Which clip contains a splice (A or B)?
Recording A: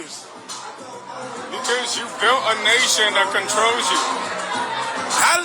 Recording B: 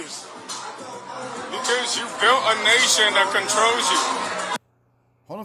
A